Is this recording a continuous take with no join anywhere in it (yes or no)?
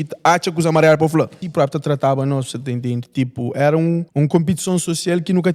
no